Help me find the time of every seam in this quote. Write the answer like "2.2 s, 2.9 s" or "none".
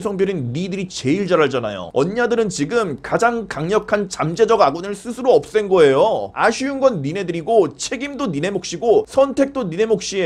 1.9 s, 6.3 s